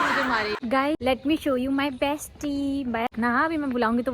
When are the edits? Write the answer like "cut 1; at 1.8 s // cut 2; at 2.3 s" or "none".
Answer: cut 1; at 1.0 s // cut 2; at 3.1 s